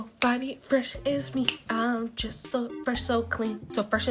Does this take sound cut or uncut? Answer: uncut